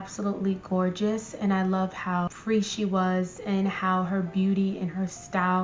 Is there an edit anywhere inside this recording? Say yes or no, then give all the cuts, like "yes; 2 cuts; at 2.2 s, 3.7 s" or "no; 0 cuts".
no; 0 cuts